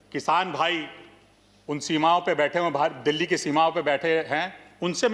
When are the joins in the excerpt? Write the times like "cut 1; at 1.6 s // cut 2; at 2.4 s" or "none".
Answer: none